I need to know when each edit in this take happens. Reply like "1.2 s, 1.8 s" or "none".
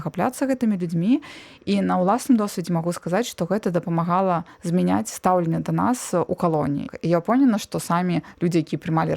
6.9 s

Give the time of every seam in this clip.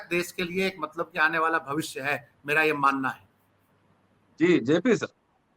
none

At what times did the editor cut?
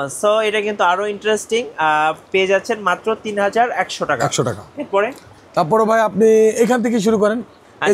none

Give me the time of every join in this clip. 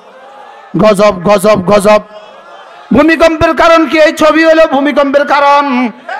none

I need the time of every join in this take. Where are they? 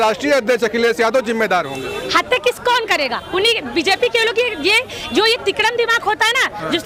none

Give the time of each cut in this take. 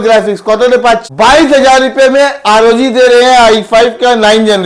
1.0 s

